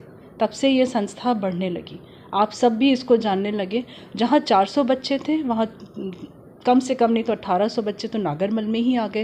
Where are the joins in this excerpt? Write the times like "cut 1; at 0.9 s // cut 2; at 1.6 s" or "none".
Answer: none